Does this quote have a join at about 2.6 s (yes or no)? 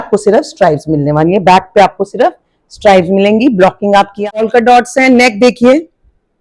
no